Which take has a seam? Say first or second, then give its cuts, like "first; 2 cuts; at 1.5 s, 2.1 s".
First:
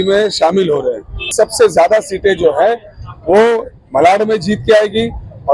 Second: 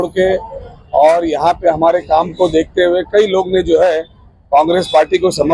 first; 1 cut; at 1.3 s